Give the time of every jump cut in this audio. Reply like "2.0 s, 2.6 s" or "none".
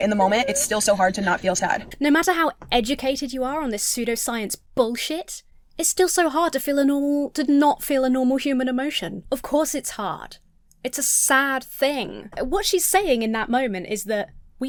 none